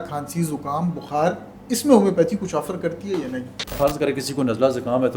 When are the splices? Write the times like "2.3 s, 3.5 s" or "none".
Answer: 3.8 s